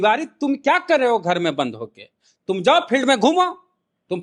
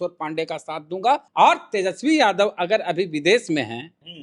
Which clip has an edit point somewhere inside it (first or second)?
second